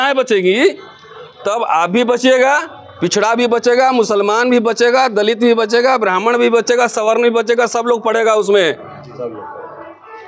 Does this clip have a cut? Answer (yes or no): no